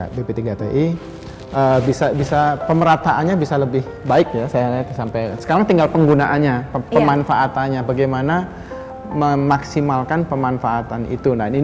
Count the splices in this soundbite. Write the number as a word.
zero